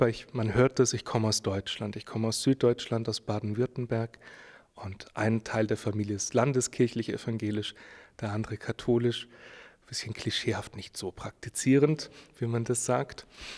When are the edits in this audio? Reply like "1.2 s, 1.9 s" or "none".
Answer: none